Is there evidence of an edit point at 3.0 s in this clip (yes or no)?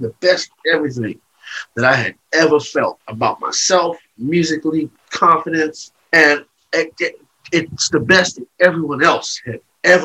yes